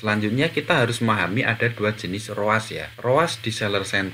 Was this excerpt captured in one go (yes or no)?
yes